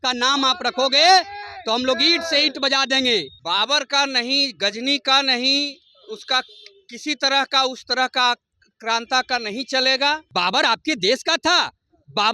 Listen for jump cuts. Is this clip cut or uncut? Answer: cut